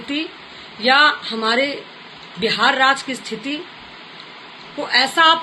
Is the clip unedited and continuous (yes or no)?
yes